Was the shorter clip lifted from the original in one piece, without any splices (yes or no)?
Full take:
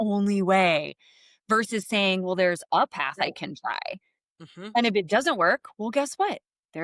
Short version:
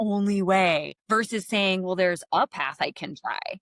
no